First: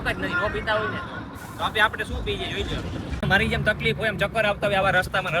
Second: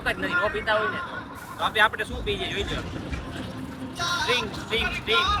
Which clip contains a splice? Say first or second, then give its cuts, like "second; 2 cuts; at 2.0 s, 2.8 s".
first; 1 cut; at 3.2 s